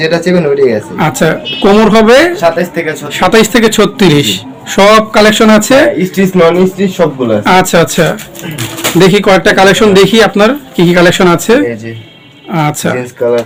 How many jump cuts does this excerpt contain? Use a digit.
0